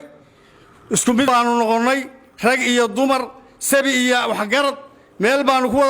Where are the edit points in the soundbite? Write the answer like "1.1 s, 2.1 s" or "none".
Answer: 1.3 s